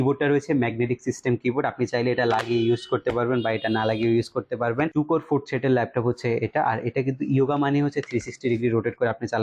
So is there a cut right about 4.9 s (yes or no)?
yes